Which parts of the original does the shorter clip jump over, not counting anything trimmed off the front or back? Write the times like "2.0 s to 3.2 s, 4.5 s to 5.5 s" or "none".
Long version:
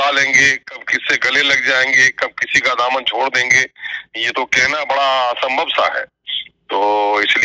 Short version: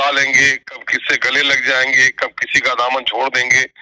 none